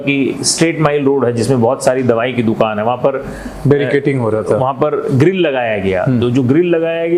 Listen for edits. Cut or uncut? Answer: uncut